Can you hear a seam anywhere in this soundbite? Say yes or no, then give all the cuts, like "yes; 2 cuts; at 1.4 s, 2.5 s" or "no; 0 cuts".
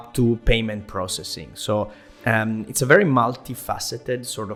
no; 0 cuts